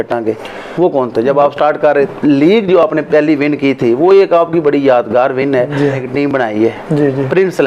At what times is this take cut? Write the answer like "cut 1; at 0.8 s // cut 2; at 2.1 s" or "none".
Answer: cut 1; at 2.1 s // cut 2; at 6.0 s